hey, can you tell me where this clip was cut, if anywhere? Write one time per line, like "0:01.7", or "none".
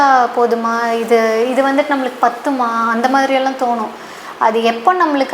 none